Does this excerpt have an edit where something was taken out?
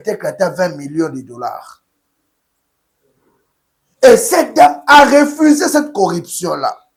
no; 0 cuts

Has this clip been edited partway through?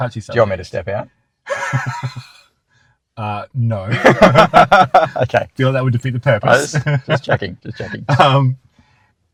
no; 0 cuts

